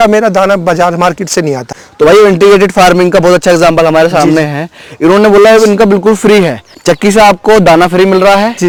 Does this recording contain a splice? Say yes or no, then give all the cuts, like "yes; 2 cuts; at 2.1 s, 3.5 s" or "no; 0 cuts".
no; 0 cuts